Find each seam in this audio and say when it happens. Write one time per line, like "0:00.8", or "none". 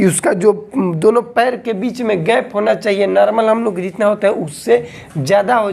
none